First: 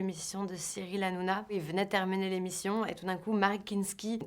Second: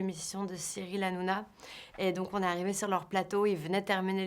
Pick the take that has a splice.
first; 1 cut; at 1.5 s

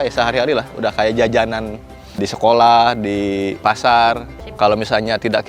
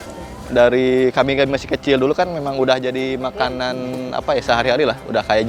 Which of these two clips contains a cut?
first; 3 cuts; at 2.3 s, 3.6 s, 4.4 s

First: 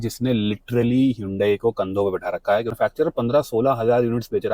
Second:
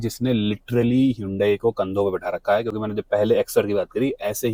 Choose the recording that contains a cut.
first; 1 cut; at 2.7 s

